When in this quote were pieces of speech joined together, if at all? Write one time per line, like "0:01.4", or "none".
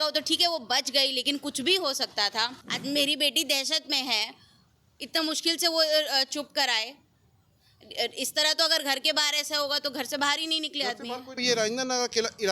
0:02.7
0:11.4